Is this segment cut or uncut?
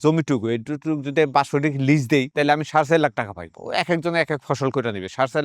uncut